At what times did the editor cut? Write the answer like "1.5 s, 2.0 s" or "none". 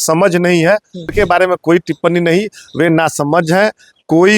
1.1 s